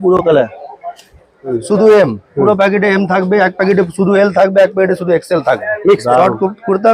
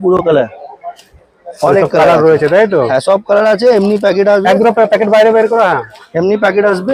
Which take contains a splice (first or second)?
first